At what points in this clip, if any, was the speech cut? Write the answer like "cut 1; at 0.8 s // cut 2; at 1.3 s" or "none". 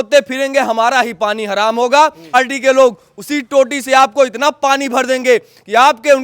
cut 1; at 2.3 s